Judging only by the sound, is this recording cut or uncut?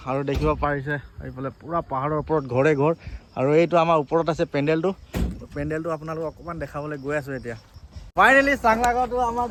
uncut